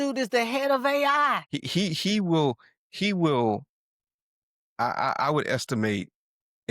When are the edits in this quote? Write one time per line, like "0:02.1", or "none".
0:01.5